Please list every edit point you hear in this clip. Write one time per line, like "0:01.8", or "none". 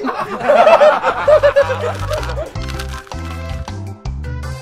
0:02.5